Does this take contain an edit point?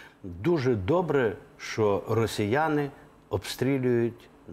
no; 0 cuts

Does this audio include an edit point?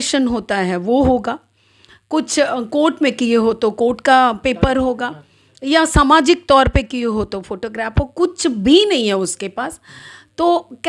no; 0 cuts

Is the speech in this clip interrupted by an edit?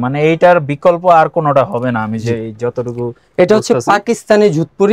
no; 0 cuts

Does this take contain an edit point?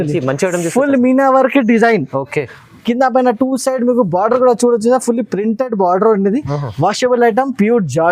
no; 0 cuts

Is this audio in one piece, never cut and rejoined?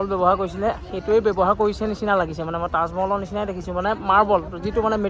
yes; 0 cuts

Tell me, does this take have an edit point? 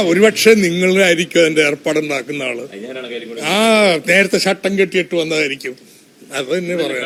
no; 0 cuts

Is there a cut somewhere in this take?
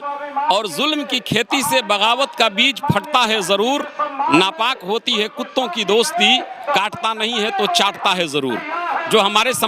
no; 0 cuts

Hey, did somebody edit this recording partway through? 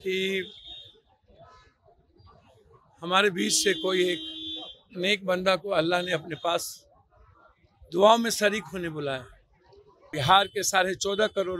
yes; 1 cut; at 10.0 s

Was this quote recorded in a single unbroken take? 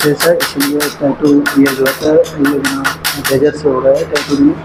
yes; 0 cuts

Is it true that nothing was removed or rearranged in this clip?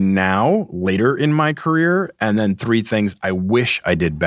yes; 0 cuts

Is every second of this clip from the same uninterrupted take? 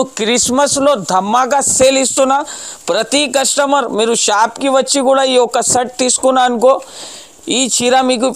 yes; 0 cuts

